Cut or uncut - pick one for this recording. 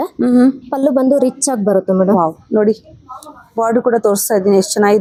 uncut